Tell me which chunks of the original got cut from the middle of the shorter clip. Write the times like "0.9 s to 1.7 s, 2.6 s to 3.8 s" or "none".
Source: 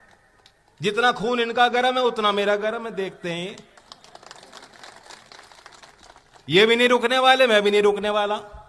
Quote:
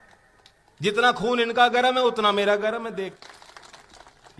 3.2 s to 5.2 s